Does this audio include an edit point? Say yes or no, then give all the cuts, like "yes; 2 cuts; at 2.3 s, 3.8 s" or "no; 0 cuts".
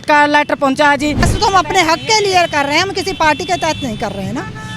yes; 1 cut; at 1.3 s